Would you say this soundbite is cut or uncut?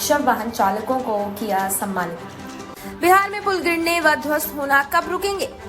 cut